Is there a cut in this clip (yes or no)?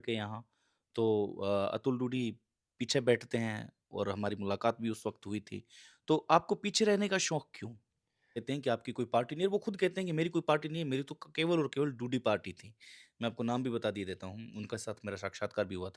yes